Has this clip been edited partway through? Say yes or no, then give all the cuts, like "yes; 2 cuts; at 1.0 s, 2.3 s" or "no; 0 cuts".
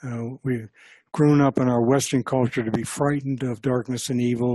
no; 0 cuts